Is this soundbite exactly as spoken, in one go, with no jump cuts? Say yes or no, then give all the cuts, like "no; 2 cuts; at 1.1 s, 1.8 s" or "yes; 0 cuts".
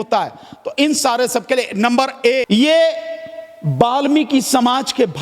no; 1 cut; at 2.5 s